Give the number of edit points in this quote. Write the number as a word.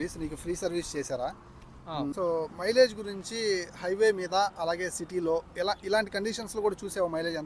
one